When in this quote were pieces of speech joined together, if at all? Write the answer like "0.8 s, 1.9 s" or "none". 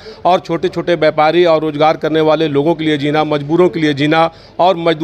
none